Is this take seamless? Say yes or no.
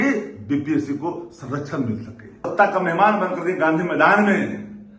no